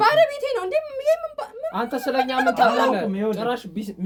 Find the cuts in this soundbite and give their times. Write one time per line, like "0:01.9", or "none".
none